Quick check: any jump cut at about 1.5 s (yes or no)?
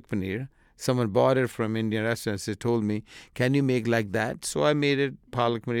yes